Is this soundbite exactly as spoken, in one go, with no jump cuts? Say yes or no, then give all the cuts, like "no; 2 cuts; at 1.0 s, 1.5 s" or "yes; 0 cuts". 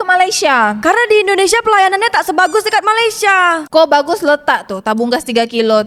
yes; 0 cuts